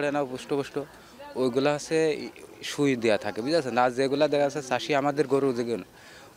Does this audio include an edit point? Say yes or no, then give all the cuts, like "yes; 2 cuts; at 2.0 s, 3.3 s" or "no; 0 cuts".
no; 0 cuts